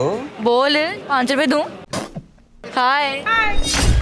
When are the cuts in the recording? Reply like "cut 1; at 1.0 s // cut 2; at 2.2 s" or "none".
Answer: cut 1; at 2.7 s